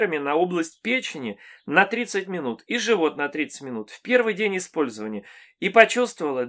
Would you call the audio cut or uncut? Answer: uncut